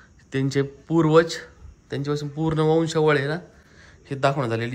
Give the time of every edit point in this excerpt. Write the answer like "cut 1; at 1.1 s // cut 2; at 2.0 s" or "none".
none